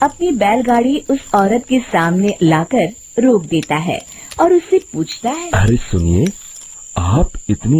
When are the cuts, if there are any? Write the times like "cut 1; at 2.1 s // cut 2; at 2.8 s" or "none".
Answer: cut 1; at 5.4 s

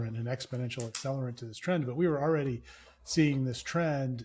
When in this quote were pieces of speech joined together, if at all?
none

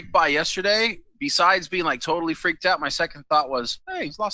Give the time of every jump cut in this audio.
none

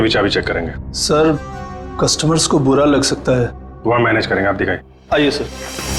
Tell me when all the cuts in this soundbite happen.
none

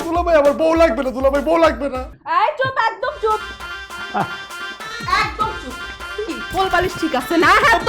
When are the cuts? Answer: cut 1; at 2.1 s

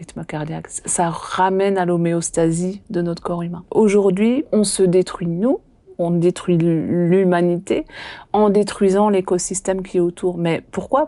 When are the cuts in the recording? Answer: cut 1; at 3.6 s // cut 2; at 4.5 s

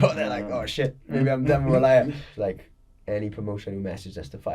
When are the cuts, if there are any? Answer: cut 1; at 2.3 s

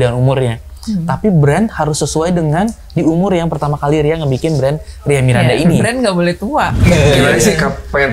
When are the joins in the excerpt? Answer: cut 1; at 6.7 s

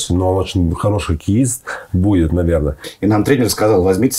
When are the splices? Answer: cut 1; at 2.8 s

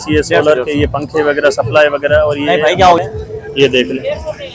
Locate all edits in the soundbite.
cut 1; at 3.0 s

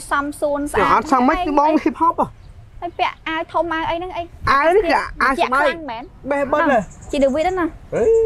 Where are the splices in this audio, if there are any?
none

